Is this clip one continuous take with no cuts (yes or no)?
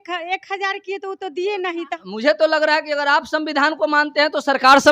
no